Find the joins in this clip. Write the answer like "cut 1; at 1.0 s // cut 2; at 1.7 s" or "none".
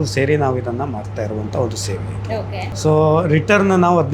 cut 1; at 2.6 s